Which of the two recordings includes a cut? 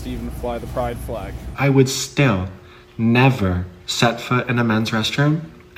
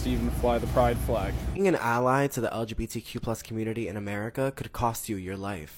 first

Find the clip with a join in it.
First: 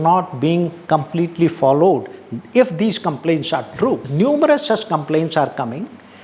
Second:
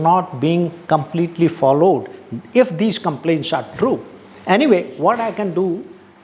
first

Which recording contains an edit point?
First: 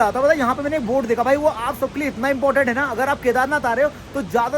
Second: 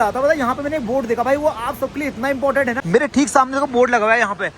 second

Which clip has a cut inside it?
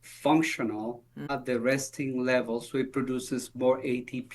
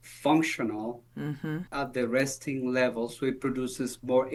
first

